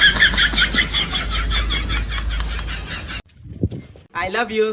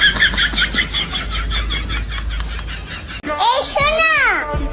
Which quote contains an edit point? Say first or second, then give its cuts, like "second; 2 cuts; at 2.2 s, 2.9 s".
second; 1 cut; at 3.2 s